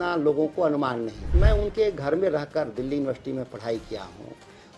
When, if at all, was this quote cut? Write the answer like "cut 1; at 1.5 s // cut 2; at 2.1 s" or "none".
cut 1; at 1.2 s